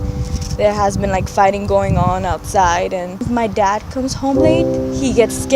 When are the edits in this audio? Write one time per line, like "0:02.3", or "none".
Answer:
0:03.2